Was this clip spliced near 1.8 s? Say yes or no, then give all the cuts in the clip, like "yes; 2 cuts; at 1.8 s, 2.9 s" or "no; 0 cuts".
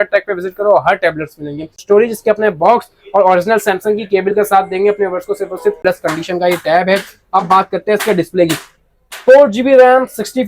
yes; 2 cuts; at 1.8 s, 5.8 s